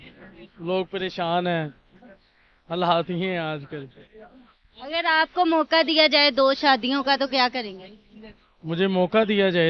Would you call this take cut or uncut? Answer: uncut